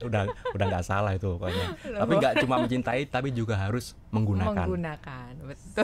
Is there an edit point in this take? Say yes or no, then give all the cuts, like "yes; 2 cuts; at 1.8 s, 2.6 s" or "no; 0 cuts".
no; 0 cuts